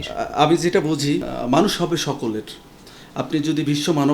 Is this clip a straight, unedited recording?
no; 1 cut; at 1.3 s

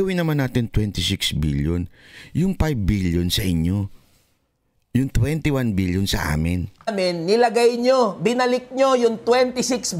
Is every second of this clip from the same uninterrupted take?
no; 1 cut; at 6.9 s

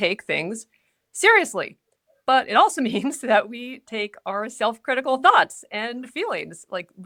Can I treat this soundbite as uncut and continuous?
yes; 0 cuts

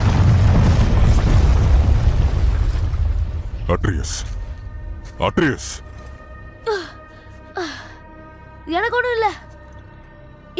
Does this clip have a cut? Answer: no; 0 cuts

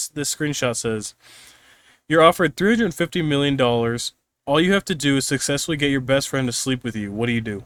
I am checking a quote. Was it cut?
no; 0 cuts

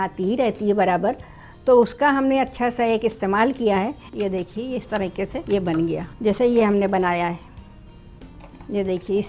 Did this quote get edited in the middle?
yes; 3 cuts; at 4.0 s, 5.4 s, 6.1 s

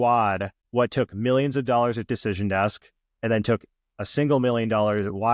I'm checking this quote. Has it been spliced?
no; 0 cuts

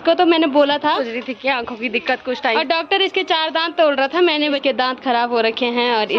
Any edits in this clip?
yes; 3 cuts; at 1.0 s, 2.6 s, 4.6 s

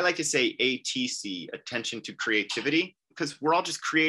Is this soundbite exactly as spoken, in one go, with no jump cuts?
no; 1 cut; at 3.1 s

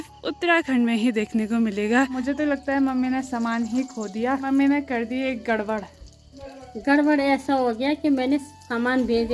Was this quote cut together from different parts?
yes; 2 cuts; at 2.2 s, 4.5 s

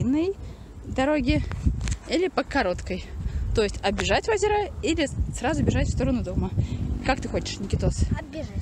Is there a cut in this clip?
no; 0 cuts

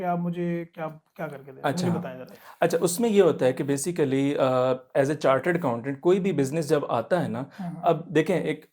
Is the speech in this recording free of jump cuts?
yes; 0 cuts

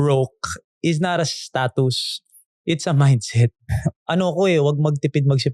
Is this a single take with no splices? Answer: no; 1 cut; at 3.6 s

